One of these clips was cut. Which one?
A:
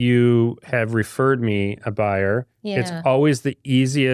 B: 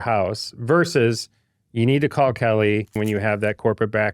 B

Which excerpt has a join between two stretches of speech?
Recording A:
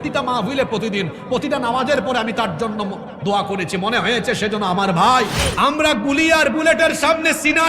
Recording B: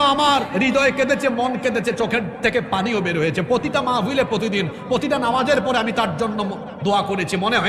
A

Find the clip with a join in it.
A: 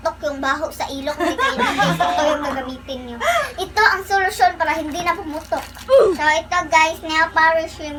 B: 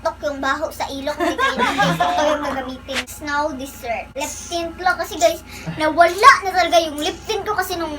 B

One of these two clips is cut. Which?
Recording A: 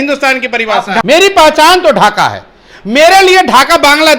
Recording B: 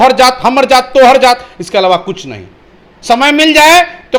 A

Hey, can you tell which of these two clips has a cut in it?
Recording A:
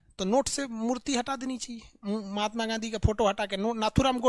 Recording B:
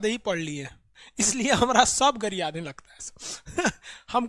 B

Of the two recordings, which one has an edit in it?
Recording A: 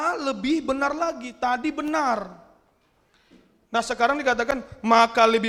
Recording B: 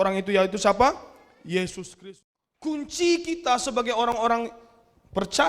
B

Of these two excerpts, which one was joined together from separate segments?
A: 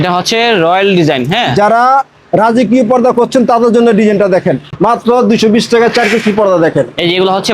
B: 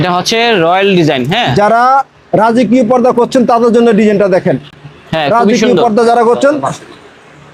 A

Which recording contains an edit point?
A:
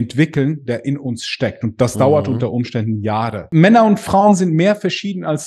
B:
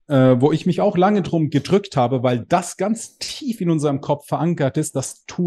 A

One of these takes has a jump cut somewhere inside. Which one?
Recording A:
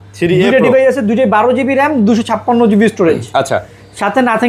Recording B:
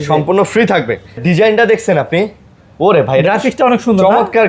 B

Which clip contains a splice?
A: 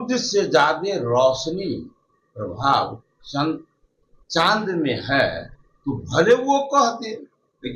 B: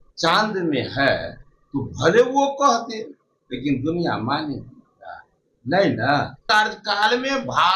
B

